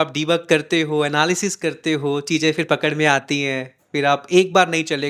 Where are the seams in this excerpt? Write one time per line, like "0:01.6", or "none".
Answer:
none